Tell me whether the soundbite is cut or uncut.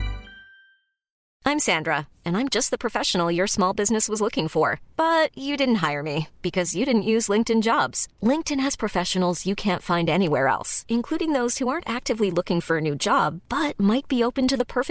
cut